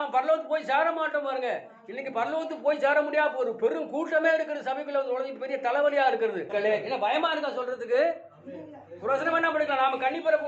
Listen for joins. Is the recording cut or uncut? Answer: cut